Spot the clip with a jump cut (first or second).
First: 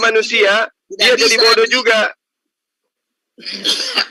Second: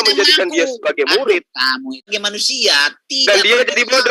second